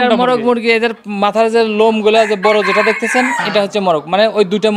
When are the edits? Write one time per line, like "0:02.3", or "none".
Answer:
none